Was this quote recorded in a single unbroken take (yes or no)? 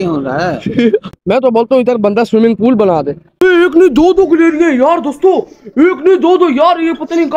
no